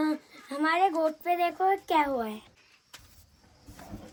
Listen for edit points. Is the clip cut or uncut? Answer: uncut